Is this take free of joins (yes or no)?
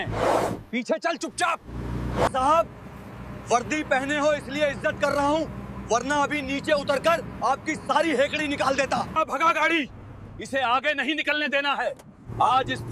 no